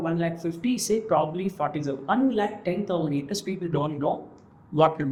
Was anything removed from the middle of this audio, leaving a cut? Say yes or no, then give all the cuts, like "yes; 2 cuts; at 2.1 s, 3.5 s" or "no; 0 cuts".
no; 0 cuts